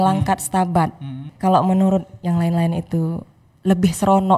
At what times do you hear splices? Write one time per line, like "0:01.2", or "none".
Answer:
0:01.2